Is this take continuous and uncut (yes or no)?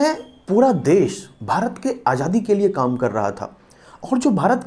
yes